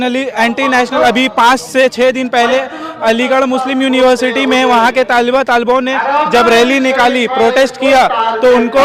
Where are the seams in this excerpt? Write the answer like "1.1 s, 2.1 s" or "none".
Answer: none